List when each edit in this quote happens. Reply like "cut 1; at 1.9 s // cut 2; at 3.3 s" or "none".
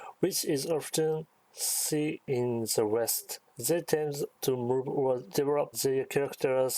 cut 1; at 2.2 s // cut 2; at 3.2 s // cut 3; at 4.3 s // cut 4; at 5.4 s